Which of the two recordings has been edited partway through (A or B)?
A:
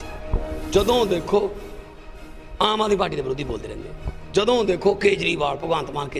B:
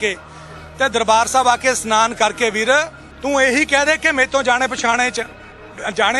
B